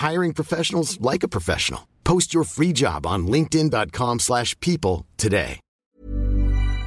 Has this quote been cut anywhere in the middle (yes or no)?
yes